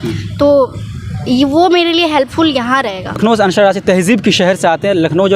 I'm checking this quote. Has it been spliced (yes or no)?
no